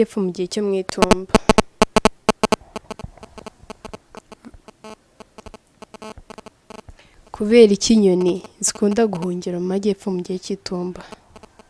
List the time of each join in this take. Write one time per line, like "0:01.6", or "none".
none